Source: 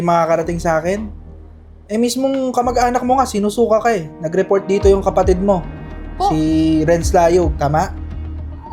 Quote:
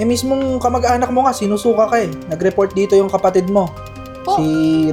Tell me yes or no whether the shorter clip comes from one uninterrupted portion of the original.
yes